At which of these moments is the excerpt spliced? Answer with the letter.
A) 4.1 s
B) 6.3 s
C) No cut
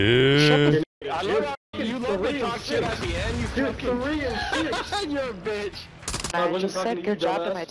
B